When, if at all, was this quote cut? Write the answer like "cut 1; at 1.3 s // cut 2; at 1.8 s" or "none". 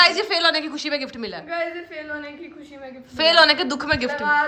none